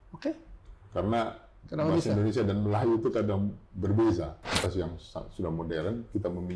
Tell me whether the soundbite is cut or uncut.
cut